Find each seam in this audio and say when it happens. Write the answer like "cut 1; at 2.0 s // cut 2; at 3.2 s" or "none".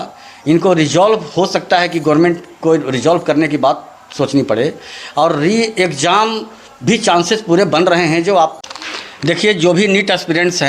cut 1; at 8.6 s